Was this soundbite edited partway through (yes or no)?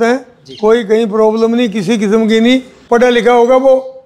yes